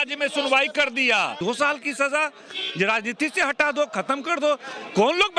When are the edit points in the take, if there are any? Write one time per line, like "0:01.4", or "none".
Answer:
0:01.4